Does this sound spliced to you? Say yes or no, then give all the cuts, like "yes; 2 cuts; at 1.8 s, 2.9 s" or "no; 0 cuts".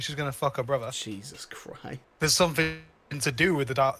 yes; 2 cuts; at 1.0 s, 2.0 s